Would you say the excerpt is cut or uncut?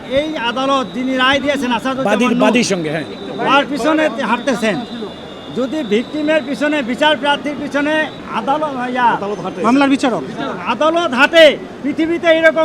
cut